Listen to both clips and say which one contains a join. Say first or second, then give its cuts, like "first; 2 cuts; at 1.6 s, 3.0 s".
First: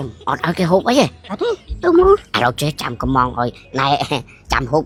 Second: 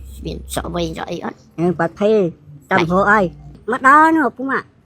second; 1 cut; at 3.6 s